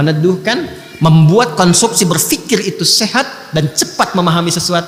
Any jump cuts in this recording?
no; 0 cuts

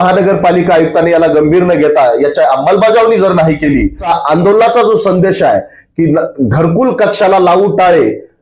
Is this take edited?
yes; 1 cut; at 4.0 s

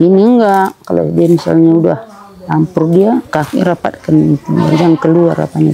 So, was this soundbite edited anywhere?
no; 0 cuts

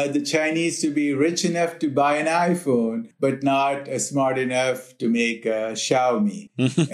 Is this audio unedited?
yes; 0 cuts

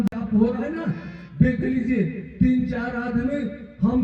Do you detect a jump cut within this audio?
no; 0 cuts

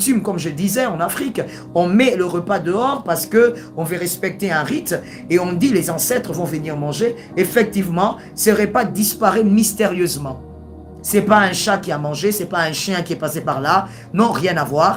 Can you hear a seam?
no; 0 cuts

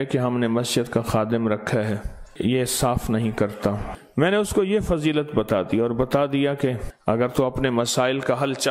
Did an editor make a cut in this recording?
yes; 3 cuts; at 2.2 s, 3.9 s, 6.9 s

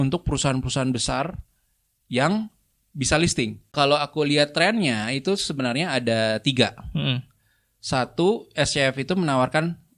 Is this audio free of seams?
no; 1 cut; at 3.7 s

